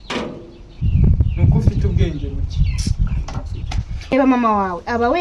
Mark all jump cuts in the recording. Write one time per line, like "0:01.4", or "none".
0:04.1